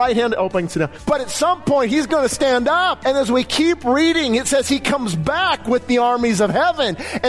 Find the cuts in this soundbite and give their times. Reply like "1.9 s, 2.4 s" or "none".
1.0 s, 3.0 s